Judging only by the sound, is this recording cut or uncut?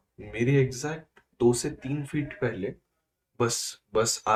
uncut